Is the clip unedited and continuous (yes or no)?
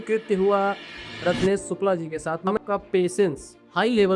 no